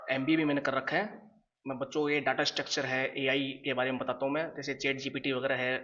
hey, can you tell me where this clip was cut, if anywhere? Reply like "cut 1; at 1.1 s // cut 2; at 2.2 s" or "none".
none